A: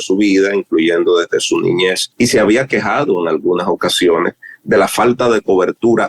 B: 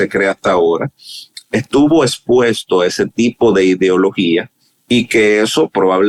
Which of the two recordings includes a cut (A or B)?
A